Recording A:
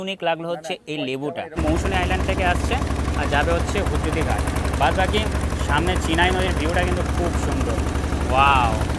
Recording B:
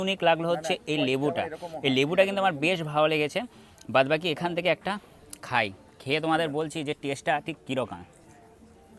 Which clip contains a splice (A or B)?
A